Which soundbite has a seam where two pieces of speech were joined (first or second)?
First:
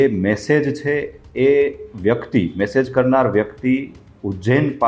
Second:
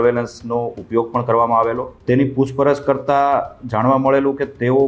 second